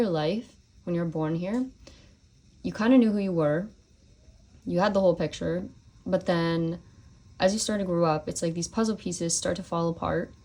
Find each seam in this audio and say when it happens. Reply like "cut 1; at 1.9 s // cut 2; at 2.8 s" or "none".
none